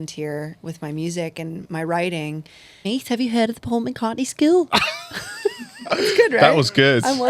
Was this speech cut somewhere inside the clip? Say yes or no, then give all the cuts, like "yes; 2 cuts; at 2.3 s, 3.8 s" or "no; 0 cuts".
yes; 1 cut; at 2.8 s